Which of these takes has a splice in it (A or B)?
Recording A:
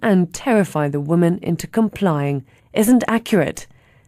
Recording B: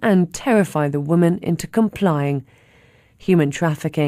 B